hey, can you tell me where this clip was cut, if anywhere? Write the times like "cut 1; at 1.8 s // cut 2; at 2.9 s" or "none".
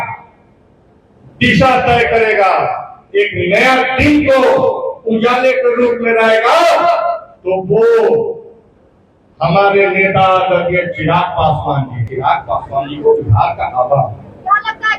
cut 1; at 12.0 s

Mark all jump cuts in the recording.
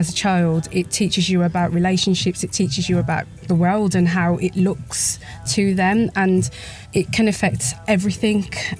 cut 1; at 2.5 s // cut 2; at 3.3 s // cut 3; at 5.5 s // cut 4; at 7.1 s

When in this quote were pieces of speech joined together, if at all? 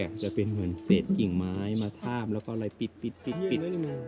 none

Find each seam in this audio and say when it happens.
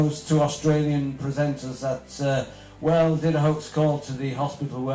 cut 1; at 3.6 s

